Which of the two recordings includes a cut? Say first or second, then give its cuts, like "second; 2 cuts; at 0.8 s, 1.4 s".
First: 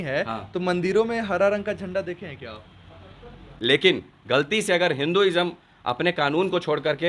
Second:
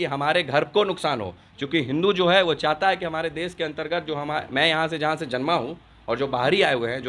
first; 1 cut; at 3.4 s